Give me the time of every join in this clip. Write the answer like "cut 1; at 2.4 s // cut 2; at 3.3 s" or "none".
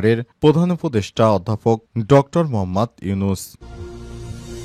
cut 1; at 3.6 s